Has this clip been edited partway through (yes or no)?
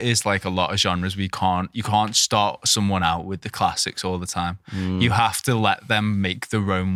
no